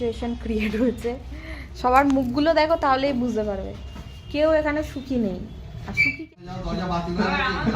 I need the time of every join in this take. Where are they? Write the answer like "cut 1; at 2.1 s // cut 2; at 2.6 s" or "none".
cut 1; at 6.3 s